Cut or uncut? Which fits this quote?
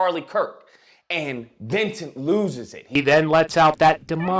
cut